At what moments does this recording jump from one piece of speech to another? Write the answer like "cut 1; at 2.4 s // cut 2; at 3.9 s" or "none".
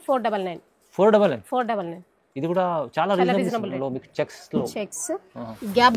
cut 1; at 3.7 s